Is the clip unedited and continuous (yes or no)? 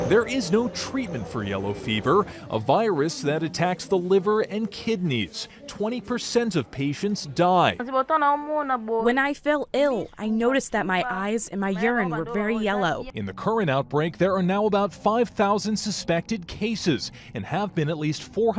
no